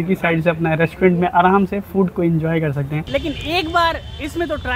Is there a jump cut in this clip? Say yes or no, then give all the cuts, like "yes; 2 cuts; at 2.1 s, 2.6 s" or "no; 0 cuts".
yes; 1 cut; at 3.0 s